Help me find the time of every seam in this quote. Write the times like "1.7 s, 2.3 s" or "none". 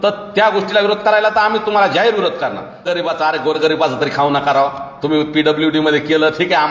2.9 s